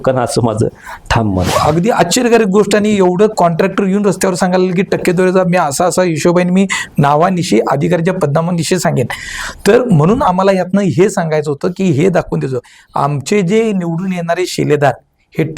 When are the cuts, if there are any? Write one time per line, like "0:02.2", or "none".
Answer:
0:01.5